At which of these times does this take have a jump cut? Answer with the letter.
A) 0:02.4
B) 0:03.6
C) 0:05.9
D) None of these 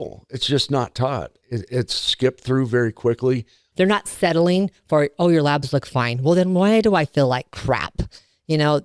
B